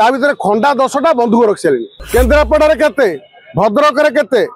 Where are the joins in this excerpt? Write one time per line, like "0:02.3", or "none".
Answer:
0:01.9